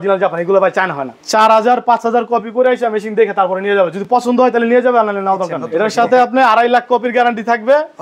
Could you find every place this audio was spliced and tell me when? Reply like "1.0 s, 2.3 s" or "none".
1.1 s, 5.6 s